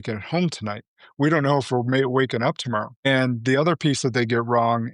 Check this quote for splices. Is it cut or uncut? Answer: cut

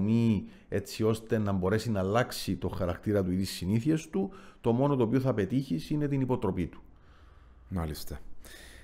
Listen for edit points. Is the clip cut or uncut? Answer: uncut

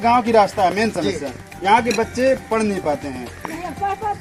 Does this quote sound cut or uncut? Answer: uncut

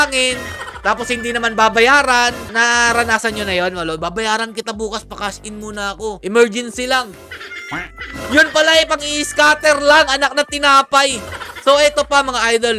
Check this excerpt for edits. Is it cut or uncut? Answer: uncut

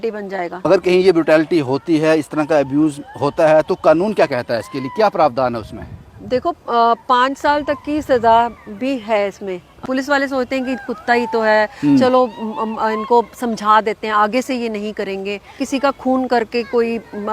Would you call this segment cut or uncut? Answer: cut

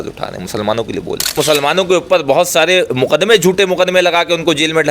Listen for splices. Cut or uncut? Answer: cut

